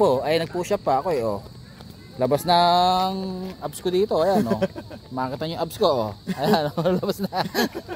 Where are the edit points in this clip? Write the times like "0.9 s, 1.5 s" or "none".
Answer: none